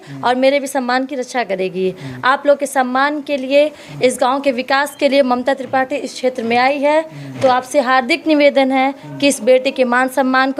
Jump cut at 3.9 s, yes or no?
no